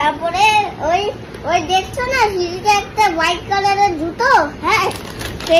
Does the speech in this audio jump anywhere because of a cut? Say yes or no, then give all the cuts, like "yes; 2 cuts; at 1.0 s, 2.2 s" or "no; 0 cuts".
no; 0 cuts